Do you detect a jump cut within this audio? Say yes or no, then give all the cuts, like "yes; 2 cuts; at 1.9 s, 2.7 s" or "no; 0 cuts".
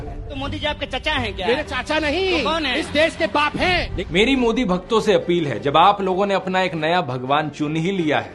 yes; 1 cut; at 3.9 s